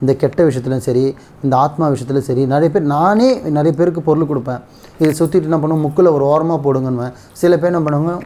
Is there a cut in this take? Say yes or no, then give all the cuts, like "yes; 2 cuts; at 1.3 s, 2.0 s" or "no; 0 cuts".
no; 0 cuts